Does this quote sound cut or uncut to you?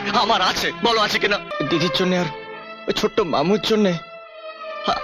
cut